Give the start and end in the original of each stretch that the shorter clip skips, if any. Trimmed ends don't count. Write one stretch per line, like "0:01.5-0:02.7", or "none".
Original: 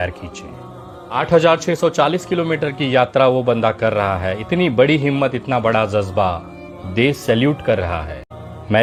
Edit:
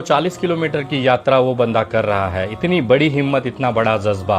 none